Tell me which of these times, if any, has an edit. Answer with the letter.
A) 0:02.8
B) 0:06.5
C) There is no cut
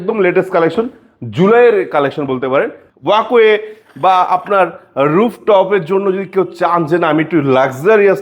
A